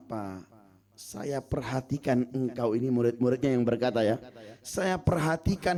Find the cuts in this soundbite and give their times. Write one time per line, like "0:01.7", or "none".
none